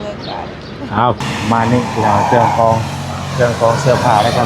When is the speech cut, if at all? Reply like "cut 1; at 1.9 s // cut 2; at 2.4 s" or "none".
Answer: cut 1; at 1.2 s